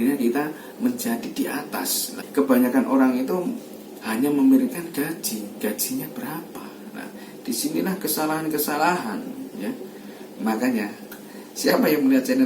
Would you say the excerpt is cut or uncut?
cut